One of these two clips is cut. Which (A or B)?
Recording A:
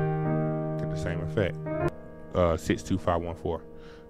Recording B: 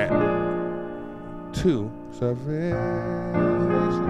A